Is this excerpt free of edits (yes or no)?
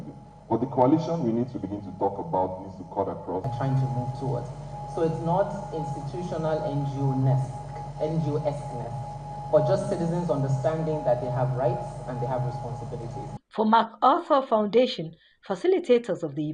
no